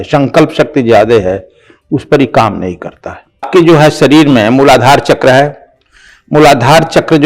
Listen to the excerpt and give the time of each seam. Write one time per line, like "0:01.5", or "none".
0:03.5